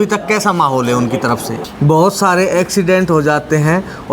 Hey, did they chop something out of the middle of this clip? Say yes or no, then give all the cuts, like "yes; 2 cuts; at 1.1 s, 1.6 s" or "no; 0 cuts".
yes; 1 cut; at 1.5 s